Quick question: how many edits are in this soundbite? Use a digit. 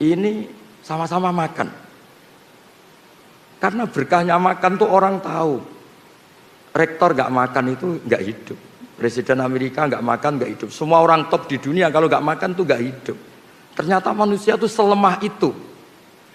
0